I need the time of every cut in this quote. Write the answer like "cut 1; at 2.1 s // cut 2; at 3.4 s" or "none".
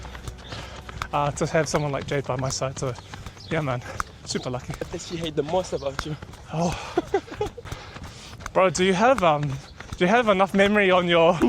cut 1; at 4.9 s // cut 2; at 7.6 s